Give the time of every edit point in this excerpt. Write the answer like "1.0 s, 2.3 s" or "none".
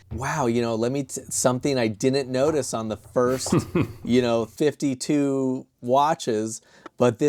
none